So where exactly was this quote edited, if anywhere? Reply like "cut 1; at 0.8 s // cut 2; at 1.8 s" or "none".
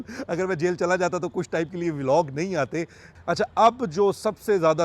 cut 1; at 3.0 s